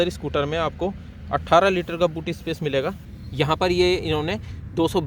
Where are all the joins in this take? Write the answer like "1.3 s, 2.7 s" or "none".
3.1 s